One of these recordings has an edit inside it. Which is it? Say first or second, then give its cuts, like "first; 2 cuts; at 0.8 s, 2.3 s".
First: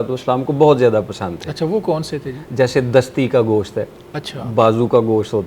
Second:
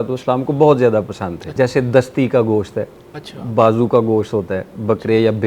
second; 1 cut; at 1.4 s